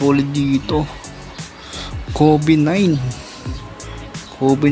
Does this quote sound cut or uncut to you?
uncut